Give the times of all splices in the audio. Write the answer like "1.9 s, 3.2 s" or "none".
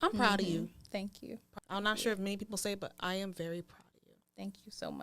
1.4 s